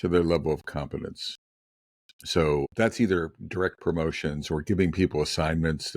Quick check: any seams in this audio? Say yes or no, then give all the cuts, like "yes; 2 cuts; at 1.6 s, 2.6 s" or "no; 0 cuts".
yes; 1 cut; at 2.7 s